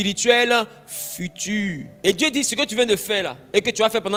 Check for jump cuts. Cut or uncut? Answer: uncut